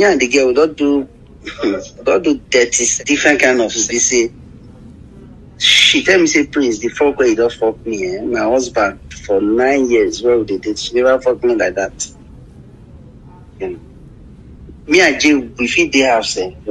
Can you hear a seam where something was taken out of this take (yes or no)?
yes